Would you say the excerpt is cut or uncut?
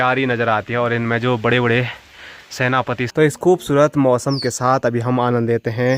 cut